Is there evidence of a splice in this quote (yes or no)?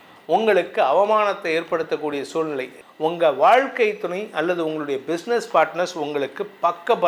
yes